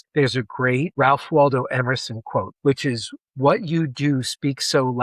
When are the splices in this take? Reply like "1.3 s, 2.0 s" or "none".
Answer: 0.9 s, 2.5 s